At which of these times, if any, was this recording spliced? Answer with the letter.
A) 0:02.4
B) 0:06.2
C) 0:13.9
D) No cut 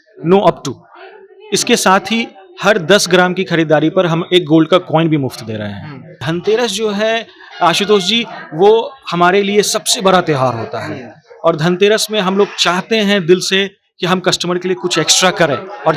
B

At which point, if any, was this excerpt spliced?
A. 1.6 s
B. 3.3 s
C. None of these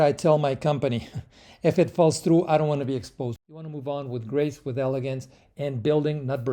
B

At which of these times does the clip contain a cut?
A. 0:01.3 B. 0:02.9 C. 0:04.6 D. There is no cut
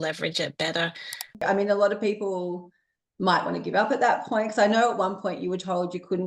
A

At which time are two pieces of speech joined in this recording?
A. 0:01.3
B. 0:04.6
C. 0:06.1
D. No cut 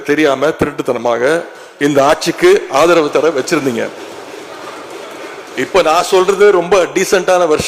D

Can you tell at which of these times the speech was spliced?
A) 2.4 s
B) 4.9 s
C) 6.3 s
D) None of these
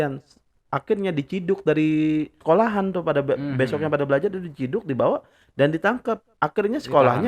A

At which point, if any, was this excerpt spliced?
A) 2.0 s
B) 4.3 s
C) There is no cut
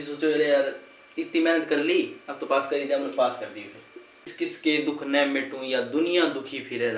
B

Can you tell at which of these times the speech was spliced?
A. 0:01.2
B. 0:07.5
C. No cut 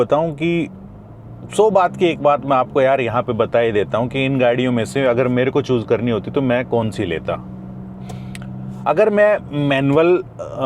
C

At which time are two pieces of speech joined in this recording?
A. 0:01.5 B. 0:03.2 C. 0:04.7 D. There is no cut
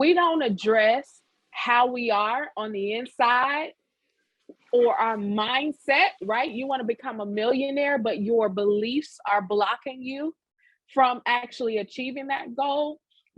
D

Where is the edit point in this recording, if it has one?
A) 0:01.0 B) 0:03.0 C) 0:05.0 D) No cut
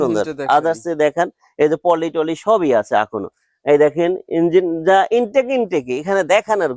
D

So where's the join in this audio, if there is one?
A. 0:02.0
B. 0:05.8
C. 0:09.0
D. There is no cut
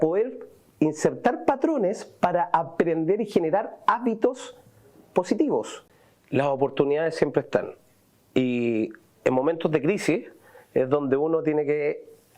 B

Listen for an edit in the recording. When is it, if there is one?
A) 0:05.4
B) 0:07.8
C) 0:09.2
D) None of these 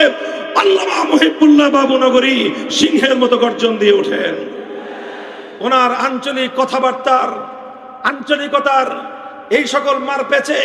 A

